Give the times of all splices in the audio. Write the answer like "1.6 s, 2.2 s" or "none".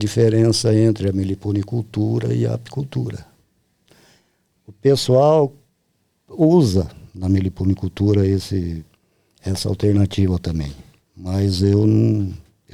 none